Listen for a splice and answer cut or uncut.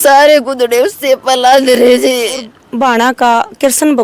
cut